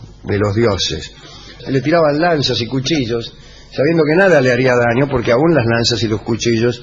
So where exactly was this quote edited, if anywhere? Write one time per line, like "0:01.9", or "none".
none